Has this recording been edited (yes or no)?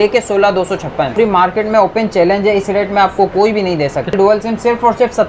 yes